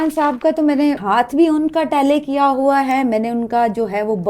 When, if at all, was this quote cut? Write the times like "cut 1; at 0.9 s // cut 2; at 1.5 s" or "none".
cut 1; at 1.0 s